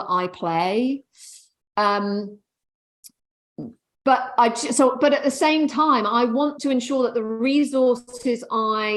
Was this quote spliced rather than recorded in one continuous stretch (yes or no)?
no